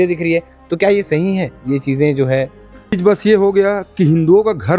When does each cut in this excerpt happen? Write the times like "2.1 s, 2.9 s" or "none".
2.9 s